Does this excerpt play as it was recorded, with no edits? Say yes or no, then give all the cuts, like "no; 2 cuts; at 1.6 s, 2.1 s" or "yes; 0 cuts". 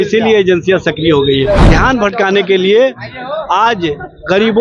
no; 1 cut; at 1.6 s